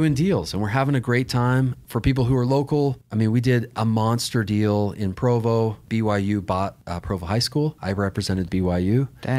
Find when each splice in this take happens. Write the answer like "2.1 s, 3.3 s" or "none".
1.8 s, 3.0 s, 5.8 s, 6.9 s, 7.8 s